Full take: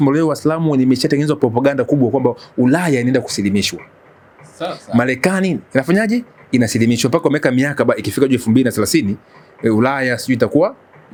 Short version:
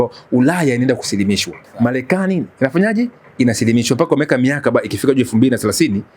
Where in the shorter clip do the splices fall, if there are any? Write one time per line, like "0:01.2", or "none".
0:01.6